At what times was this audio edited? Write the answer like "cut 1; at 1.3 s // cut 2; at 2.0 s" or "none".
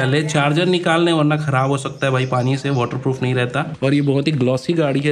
cut 1; at 3.8 s